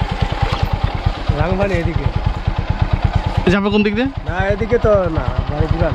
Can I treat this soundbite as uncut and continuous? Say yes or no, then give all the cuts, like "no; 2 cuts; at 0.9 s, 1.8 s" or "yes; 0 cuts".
yes; 0 cuts